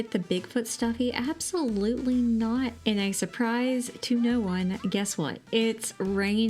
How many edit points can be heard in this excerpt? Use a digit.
1